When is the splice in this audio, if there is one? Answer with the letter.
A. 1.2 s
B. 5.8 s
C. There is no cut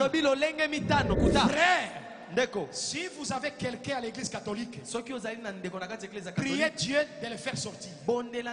A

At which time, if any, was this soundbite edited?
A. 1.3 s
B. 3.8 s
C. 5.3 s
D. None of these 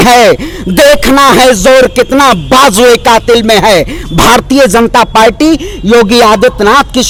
D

